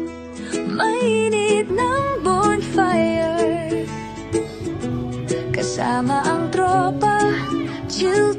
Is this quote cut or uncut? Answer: uncut